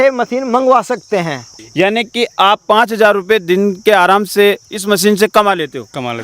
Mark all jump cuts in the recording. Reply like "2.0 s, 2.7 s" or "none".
1.5 s